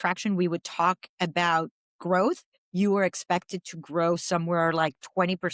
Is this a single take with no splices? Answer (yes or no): yes